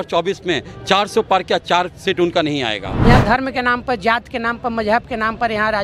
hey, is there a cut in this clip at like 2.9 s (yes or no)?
yes